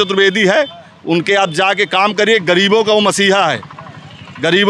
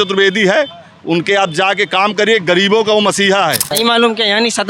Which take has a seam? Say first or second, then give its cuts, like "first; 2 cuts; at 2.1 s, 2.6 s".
second; 1 cut; at 3.7 s